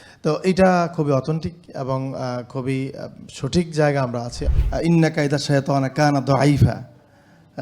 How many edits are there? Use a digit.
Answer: 1